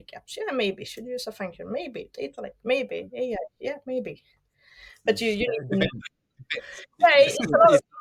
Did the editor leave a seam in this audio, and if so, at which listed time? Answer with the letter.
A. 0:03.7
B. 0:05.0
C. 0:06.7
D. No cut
D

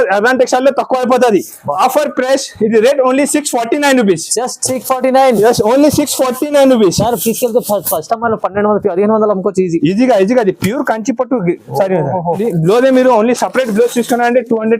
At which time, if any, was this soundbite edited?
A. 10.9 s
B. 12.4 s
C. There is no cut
B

